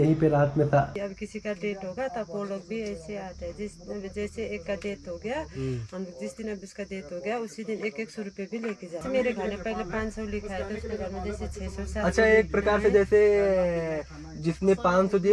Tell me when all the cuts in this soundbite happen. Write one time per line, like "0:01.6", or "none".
0:00.9
0:09.0